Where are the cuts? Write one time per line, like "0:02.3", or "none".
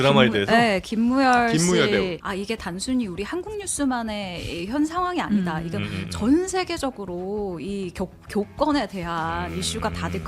0:02.2